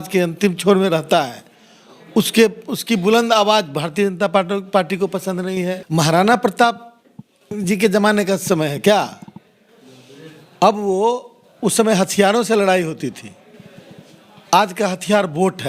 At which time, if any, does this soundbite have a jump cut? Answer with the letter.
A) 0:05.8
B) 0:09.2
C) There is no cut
A